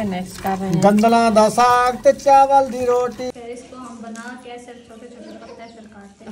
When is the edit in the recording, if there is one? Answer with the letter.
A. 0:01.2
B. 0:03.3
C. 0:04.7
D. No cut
B